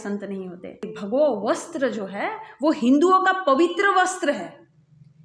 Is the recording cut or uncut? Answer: cut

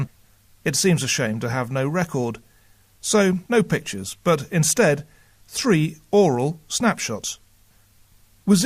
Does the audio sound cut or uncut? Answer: cut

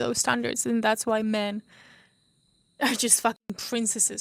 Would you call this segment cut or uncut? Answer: uncut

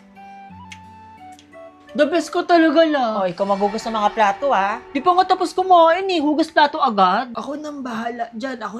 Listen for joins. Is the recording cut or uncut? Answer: uncut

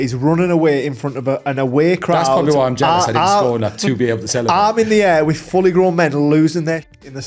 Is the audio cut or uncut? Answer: uncut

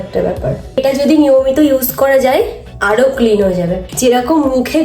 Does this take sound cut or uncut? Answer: cut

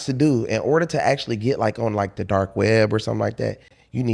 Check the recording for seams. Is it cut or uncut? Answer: uncut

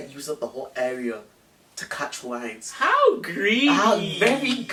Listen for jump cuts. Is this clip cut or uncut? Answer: uncut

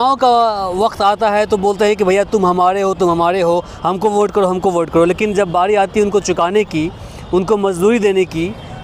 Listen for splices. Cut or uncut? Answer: uncut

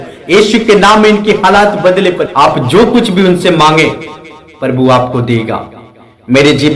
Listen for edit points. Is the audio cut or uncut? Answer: cut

